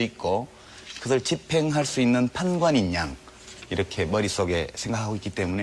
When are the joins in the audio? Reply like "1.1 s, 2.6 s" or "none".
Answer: none

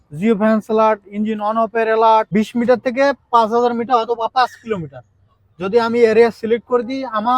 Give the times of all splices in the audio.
2.3 s

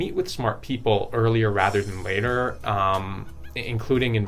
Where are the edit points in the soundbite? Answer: none

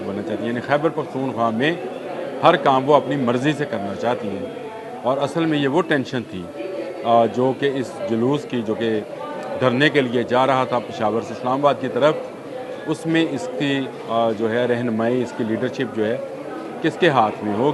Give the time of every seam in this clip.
none

